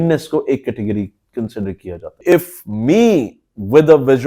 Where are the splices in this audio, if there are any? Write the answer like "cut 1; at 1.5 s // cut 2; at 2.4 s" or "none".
cut 1; at 2.2 s

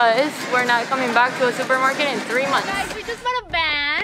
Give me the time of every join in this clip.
cut 1; at 2.8 s

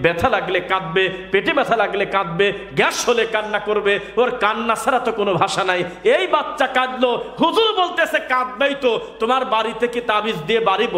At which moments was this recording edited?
none

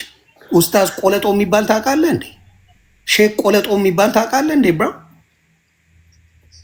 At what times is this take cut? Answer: none

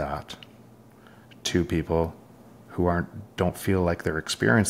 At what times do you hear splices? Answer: none

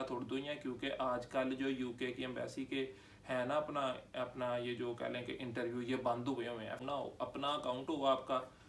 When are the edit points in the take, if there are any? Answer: cut 1; at 6.8 s

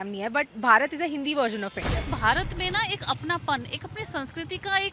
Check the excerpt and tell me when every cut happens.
cut 1; at 2.1 s

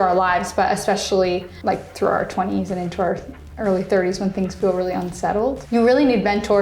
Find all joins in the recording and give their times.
cut 1; at 1.5 s // cut 2; at 5.6 s

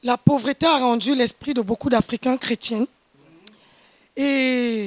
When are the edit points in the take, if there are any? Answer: none

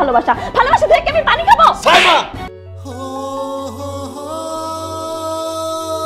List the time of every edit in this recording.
cut 1; at 2.6 s

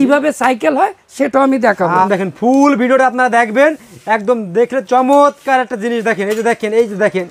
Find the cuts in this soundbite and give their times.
cut 1; at 2.1 s

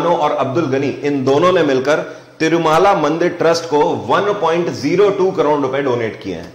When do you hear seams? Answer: none

